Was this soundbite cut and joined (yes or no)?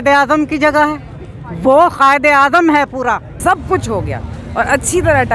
yes